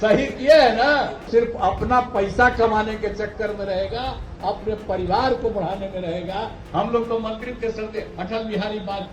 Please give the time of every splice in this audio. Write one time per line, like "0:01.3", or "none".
0:01.2
0:06.6